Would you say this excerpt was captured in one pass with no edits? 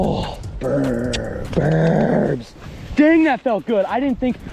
yes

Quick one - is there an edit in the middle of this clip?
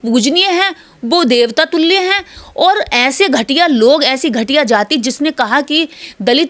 no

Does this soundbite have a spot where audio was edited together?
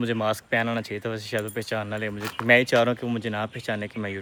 no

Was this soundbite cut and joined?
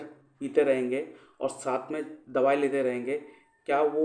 no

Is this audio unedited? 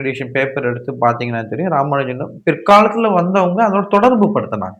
yes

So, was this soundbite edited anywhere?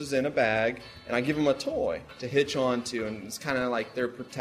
yes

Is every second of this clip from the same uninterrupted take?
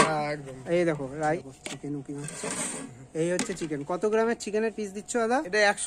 no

